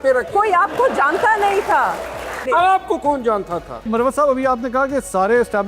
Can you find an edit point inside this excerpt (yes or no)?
yes